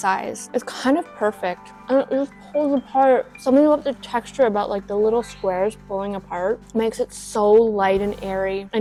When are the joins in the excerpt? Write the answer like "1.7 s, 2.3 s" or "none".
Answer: none